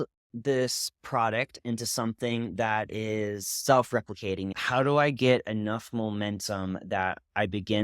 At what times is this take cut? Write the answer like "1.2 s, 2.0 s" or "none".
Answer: 4.5 s